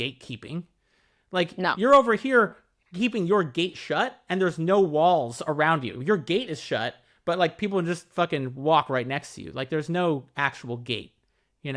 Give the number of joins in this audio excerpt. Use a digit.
0